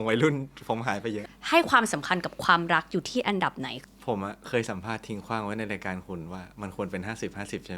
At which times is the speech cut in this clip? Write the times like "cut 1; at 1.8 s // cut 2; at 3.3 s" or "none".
cut 1; at 1.3 s // cut 2; at 3.7 s